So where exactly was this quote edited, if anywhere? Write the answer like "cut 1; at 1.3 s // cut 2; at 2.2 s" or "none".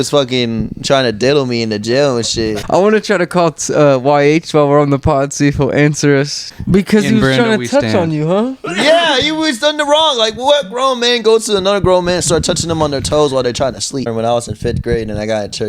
cut 1; at 2.6 s // cut 2; at 6.4 s // cut 3; at 14.0 s

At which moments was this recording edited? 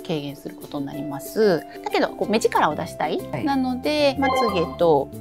cut 1; at 1.7 s // cut 2; at 4.2 s

